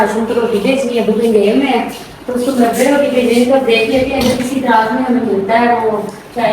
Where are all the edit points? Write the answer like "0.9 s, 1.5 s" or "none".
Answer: none